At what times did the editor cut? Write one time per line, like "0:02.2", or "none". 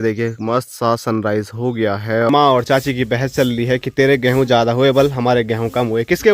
0:02.3